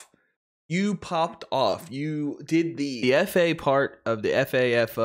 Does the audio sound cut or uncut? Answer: cut